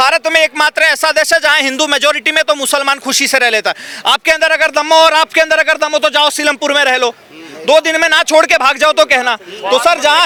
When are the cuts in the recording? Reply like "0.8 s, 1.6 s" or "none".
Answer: none

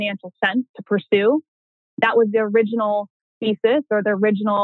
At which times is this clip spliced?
none

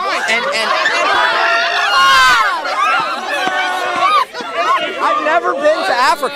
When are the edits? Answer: none

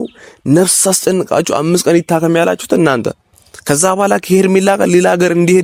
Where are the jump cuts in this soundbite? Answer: none

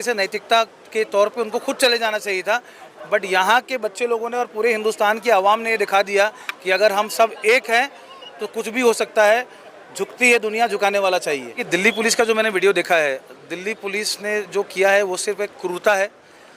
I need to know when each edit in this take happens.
11.6 s

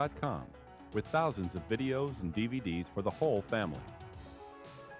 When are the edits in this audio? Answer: 3.8 s

